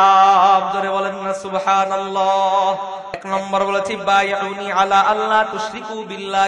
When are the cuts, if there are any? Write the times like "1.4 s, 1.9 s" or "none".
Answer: 3.2 s